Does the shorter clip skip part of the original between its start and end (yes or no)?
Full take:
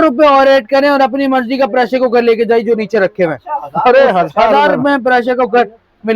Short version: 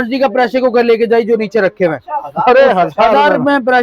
no